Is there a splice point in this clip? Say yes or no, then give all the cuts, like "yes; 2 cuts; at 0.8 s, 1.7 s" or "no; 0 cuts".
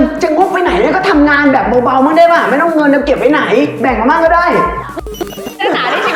yes; 1 cut; at 4.9 s